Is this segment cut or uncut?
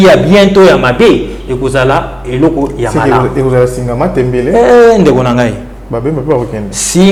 uncut